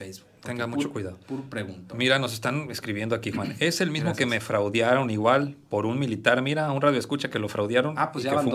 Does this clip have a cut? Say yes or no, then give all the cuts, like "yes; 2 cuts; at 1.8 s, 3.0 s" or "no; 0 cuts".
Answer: no; 0 cuts